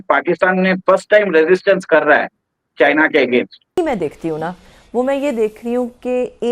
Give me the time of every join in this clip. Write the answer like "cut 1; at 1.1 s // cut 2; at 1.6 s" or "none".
cut 1; at 3.6 s